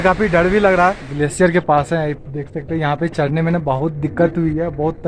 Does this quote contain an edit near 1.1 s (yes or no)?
yes